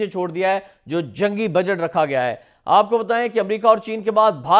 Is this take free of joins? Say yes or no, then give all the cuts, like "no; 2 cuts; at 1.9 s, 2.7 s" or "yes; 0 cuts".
yes; 0 cuts